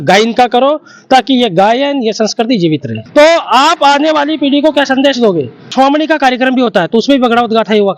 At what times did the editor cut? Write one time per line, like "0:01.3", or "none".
0:03.0
0:05.7